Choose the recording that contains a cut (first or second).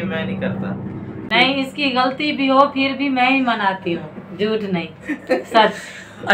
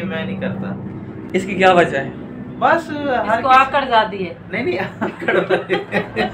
first